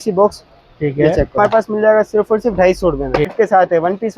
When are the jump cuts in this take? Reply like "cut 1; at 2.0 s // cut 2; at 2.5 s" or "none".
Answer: cut 1; at 1.4 s // cut 2; at 3.3 s